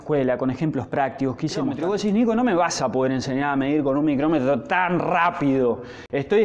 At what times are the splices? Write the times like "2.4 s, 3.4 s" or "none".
1.8 s